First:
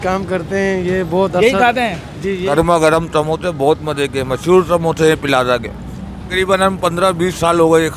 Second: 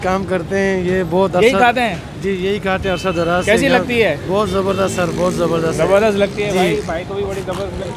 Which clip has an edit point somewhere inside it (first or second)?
first